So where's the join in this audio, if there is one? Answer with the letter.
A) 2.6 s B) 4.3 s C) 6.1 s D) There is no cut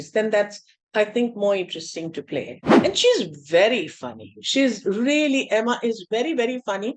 A